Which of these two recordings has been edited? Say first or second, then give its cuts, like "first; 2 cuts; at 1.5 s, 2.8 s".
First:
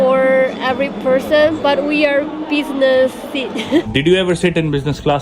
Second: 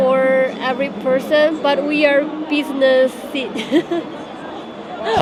first; 1 cut; at 3.9 s